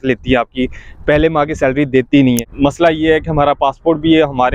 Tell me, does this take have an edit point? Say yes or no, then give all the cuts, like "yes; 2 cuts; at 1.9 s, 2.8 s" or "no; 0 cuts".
yes; 1 cut; at 2.5 s